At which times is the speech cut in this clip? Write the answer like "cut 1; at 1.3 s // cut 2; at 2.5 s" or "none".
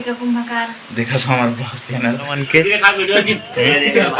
cut 1; at 2.4 s